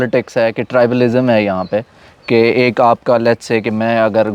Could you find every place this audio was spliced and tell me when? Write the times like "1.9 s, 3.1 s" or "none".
none